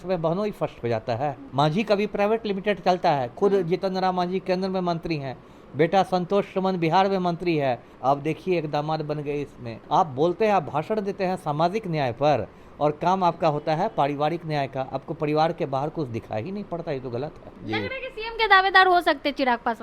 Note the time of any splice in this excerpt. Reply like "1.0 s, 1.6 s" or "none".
1.4 s, 7.9 s, 9.7 s, 17.5 s